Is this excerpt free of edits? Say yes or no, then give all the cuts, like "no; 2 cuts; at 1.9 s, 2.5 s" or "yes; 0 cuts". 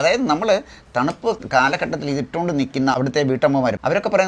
no; 2 cuts; at 1.4 s, 3.0 s